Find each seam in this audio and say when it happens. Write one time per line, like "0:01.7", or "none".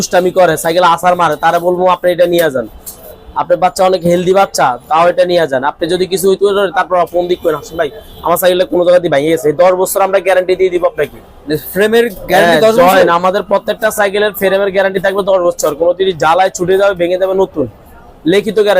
none